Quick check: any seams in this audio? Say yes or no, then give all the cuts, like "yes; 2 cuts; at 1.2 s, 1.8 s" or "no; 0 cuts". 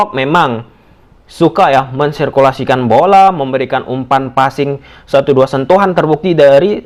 no; 0 cuts